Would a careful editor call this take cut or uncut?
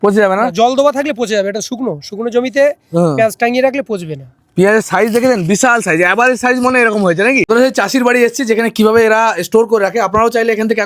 cut